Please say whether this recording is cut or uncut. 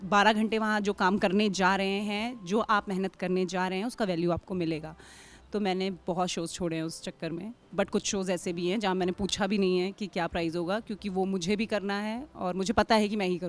uncut